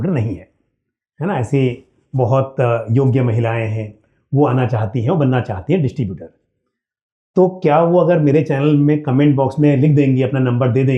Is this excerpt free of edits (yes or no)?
yes